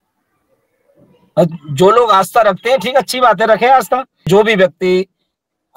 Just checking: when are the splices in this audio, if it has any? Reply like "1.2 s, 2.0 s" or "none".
4.3 s